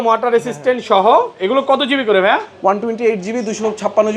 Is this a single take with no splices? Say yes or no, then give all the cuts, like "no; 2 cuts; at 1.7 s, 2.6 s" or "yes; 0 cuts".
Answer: yes; 0 cuts